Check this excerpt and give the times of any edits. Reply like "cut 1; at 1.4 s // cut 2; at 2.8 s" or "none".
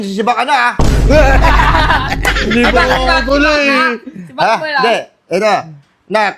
none

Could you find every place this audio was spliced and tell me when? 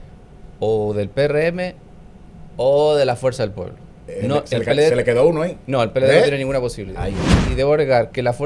cut 1; at 7.4 s

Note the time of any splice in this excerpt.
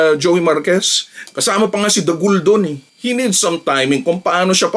cut 1; at 1.3 s // cut 2; at 2.8 s

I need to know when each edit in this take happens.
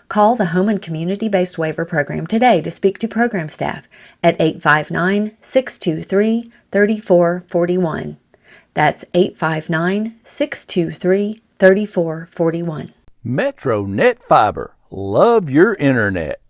cut 1; at 13.0 s

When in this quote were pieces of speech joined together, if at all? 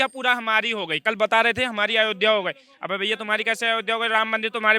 cut 1; at 1.0 s

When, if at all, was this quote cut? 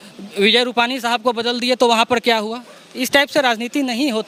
none

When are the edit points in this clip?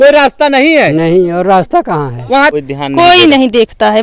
cut 1; at 2.5 s

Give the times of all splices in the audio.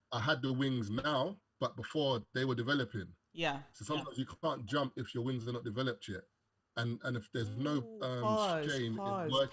cut 1; at 1.4 s

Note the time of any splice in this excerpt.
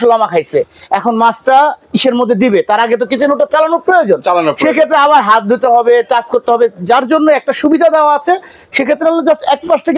none

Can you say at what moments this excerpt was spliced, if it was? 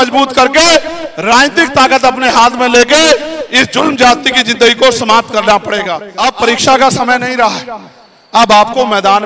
cut 1; at 6.0 s

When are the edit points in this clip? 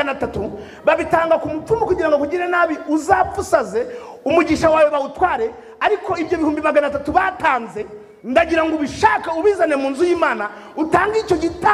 none

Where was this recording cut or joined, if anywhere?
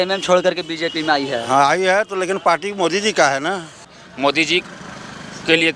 cut 1; at 3.8 s

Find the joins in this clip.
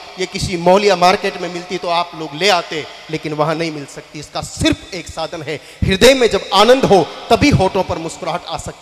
none

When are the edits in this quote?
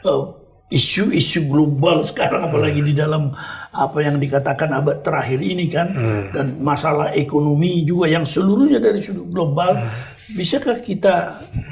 none

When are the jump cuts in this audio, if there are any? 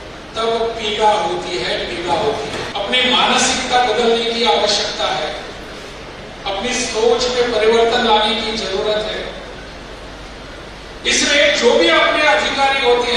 cut 1; at 2.7 s

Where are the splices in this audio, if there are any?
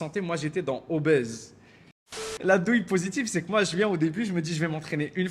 cut 1; at 2.1 s

